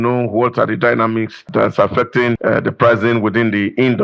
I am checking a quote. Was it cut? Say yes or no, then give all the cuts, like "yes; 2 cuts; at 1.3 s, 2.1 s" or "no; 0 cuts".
yes; 2 cuts; at 1.5 s, 2.4 s